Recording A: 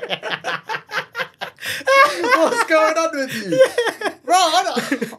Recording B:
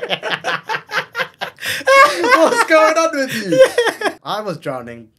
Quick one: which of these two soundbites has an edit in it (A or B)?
B